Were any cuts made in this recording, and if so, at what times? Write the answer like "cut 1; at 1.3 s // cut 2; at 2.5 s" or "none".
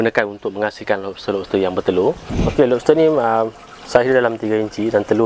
cut 1; at 2.2 s